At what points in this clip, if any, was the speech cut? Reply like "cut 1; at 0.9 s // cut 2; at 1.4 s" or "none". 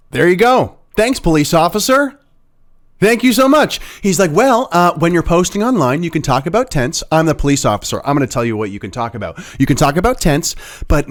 none